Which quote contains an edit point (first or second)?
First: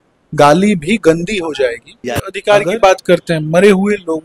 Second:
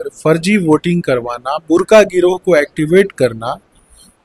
first